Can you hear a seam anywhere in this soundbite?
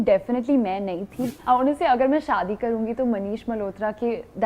yes; 1 cut; at 1.4 s

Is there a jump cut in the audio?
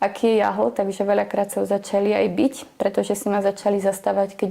no; 0 cuts

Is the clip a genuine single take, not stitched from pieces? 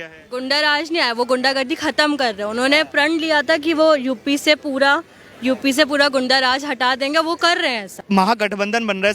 no; 1 cut; at 7.9 s

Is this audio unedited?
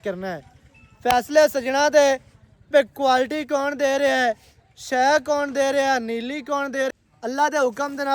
no; 1 cut; at 6.9 s

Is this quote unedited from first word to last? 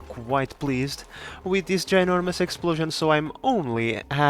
yes; 0 cuts

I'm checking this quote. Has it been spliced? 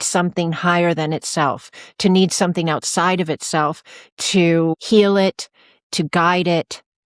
yes; 1 cut; at 4.7 s

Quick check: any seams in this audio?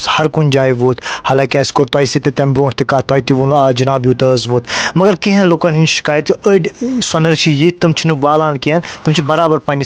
no; 0 cuts

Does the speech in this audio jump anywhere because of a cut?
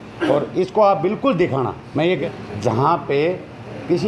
yes; 1 cut; at 2.2 s

